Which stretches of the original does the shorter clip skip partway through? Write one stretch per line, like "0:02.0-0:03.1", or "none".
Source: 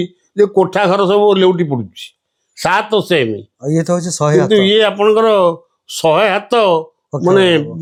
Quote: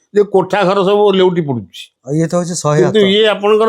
0:02.2-0:03.5